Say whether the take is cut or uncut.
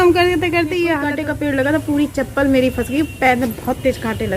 cut